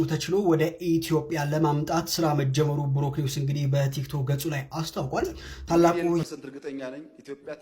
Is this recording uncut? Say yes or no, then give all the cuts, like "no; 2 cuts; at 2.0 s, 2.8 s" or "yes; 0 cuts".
no; 1 cut; at 6.2 s